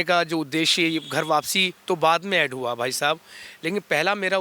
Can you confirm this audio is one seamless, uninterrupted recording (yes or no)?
yes